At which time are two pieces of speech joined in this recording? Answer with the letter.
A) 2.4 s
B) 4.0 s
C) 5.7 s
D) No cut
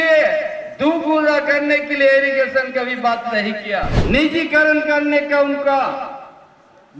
B